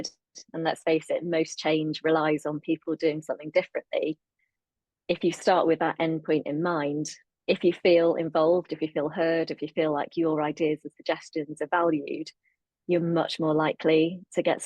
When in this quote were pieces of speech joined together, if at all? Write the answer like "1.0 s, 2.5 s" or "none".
7.2 s

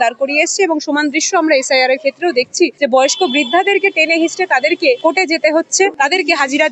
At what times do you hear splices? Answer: 2.7 s, 5.0 s, 5.9 s

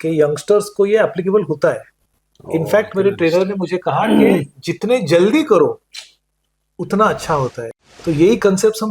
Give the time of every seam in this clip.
7.8 s

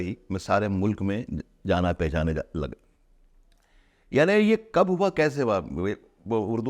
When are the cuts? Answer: none

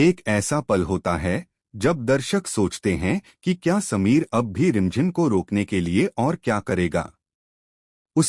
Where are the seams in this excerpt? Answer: 2.0 s

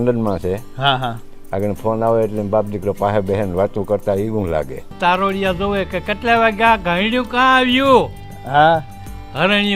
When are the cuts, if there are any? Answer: 4.8 s

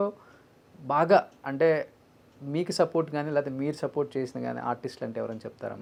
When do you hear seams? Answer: none

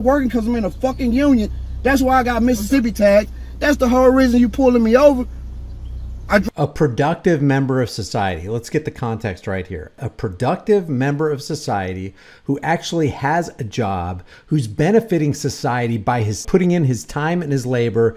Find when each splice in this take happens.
none

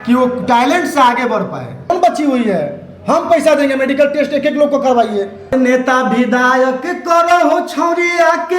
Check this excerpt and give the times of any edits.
1.9 s, 5.5 s

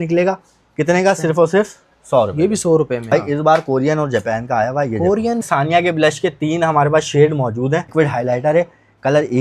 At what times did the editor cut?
3.1 s, 5.4 s, 7.9 s

